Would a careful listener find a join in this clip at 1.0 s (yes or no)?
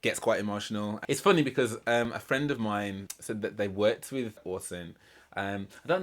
yes